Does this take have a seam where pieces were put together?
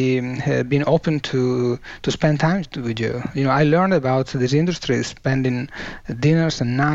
no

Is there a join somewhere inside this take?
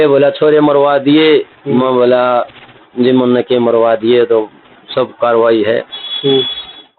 no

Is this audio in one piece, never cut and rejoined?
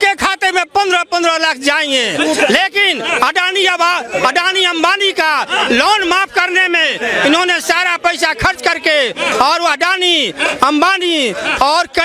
yes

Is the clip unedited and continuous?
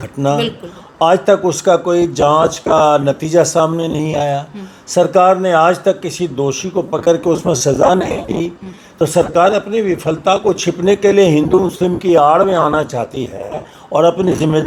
yes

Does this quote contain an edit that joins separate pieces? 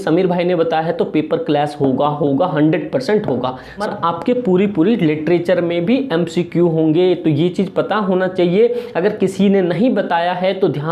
yes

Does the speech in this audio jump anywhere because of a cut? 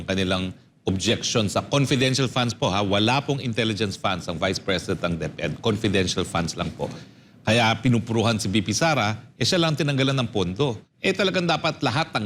yes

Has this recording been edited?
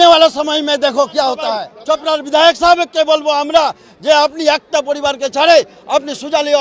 yes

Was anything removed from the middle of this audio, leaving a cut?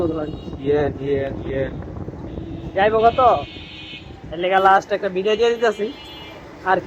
no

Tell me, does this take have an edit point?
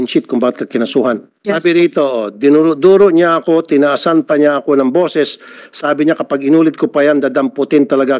yes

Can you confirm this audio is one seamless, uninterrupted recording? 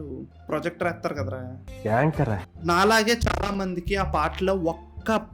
no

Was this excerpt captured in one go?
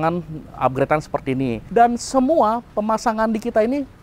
no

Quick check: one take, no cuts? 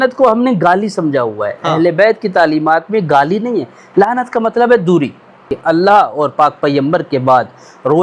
no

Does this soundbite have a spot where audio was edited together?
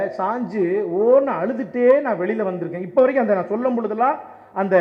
no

